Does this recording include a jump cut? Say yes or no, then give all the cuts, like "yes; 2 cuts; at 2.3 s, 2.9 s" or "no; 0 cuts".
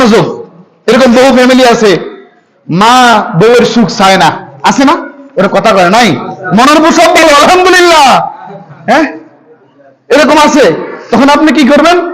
no; 0 cuts